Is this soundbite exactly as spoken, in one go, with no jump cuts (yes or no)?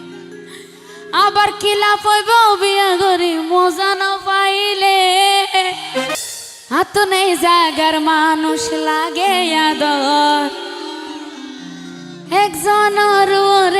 no